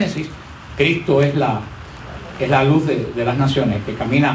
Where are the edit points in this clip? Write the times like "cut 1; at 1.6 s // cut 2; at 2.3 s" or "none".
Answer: cut 1; at 3.3 s